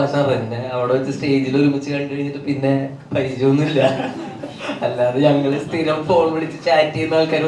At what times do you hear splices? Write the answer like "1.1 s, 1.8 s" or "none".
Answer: none